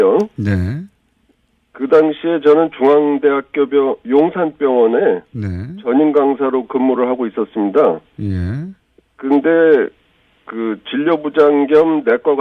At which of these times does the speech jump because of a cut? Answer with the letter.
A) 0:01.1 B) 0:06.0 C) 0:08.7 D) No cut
D